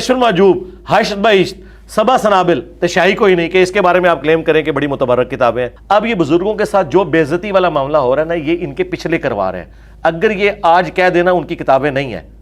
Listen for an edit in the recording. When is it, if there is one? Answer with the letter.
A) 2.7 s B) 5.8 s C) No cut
B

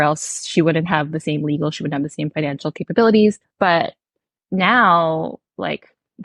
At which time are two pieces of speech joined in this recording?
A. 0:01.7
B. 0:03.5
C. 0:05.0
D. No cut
B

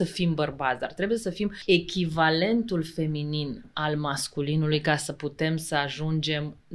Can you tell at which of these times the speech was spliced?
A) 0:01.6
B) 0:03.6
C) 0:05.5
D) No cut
A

